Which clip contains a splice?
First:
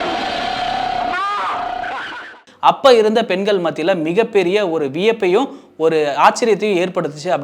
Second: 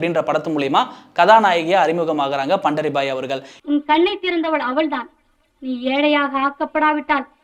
first; 1 cut; at 2.5 s

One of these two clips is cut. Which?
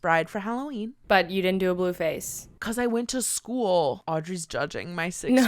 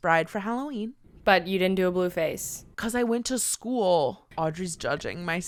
first; 2 cuts; at 0.9 s, 4.0 s

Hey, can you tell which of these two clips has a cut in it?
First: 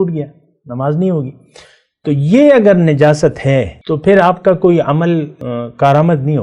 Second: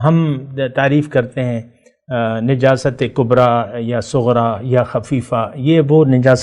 first; 2 cuts; at 3.8 s, 5.4 s

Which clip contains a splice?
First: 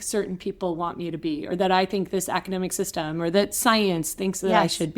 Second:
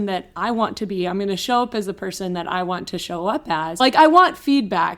second; 1 cut; at 3.7 s

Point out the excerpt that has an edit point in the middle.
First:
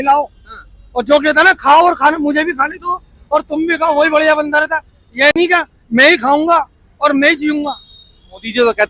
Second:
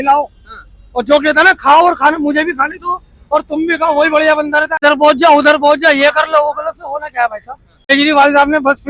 second; 2 cuts; at 4.8 s, 7.9 s

